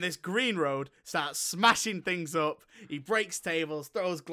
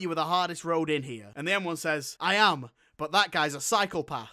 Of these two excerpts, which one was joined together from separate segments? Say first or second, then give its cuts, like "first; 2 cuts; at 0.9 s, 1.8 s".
second; 1 cut; at 1.8 s